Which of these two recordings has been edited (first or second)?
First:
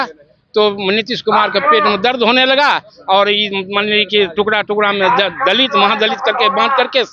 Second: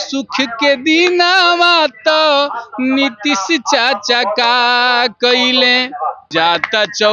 second